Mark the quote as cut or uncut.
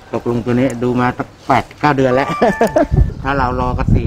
cut